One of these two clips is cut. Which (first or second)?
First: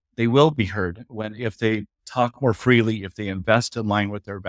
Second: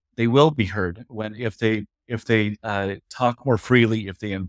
first